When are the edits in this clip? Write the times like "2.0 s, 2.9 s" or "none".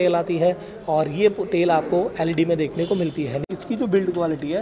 3.4 s

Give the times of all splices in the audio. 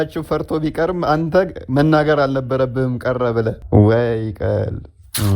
3.6 s

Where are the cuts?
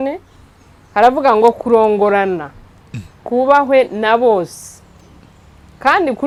none

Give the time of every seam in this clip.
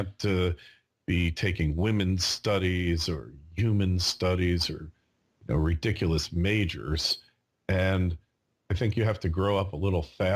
7.7 s

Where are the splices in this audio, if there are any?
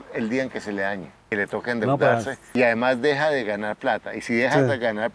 1.1 s, 2.4 s

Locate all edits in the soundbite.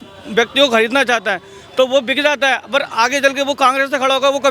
none

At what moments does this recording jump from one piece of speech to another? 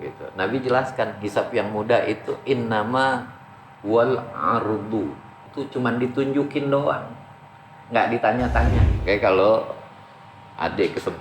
5.5 s, 8.8 s

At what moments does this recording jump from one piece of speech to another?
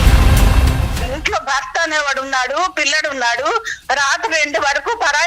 1.0 s

